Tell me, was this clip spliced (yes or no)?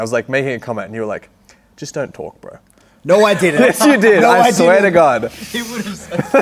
no